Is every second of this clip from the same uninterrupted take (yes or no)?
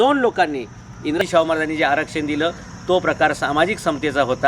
no